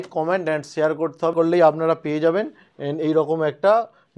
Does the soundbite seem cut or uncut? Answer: cut